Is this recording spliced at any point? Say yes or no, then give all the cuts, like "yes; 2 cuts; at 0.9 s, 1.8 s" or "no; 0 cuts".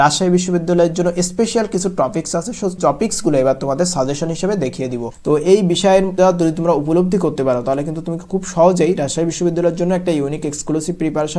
yes; 3 cuts; at 2.8 s, 5.1 s, 6.1 s